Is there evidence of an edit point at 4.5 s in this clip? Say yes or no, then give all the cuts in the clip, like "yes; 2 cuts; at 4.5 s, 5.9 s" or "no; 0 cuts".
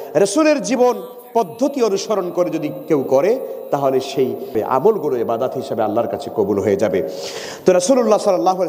yes; 1 cut; at 4.5 s